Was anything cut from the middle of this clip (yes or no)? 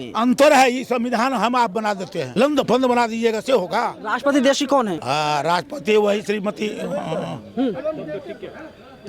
yes